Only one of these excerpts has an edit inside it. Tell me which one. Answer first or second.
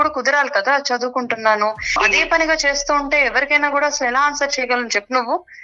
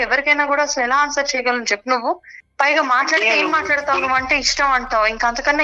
first